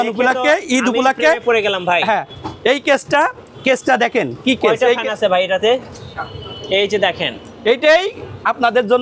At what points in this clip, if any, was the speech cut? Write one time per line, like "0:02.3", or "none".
none